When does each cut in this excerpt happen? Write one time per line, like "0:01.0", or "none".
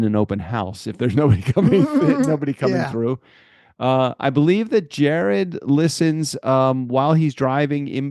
none